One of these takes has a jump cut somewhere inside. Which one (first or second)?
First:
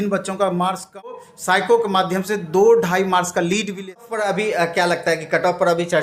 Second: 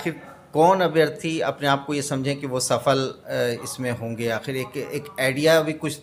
first